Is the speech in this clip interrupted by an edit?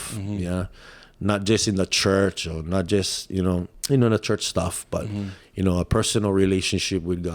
yes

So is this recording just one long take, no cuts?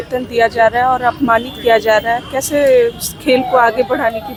yes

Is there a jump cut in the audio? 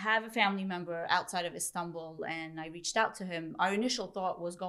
no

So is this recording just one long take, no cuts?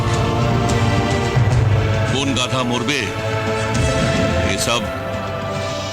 yes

